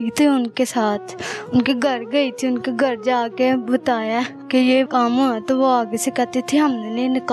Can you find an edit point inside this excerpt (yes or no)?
yes